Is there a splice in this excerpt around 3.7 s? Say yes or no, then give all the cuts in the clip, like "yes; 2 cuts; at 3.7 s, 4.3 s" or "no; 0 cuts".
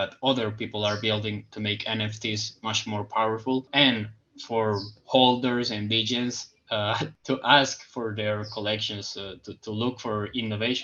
yes; 2 cuts; at 3.7 s, 7.1 s